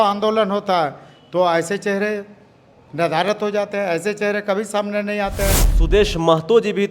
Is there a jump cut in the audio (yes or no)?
yes